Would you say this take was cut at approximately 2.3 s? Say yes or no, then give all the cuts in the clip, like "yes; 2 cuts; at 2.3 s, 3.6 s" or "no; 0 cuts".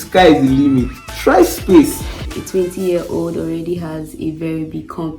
yes; 1 cut; at 2.3 s